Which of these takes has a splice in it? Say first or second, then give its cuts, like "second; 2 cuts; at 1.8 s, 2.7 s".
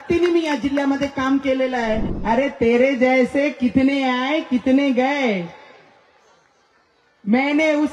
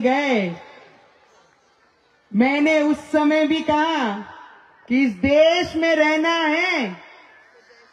first; 1 cut; at 2.1 s